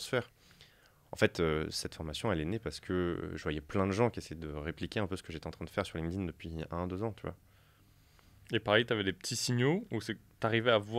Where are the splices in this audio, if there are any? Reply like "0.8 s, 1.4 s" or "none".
none